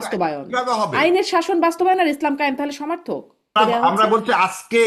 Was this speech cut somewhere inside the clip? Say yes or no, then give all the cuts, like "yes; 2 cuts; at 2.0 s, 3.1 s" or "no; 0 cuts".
yes; 1 cut; at 3.6 s